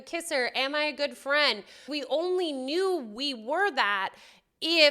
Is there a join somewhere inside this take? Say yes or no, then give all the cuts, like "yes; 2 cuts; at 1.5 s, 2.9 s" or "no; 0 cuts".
yes; 1 cut; at 1.9 s